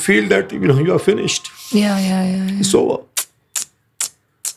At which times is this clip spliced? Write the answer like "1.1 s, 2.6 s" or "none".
none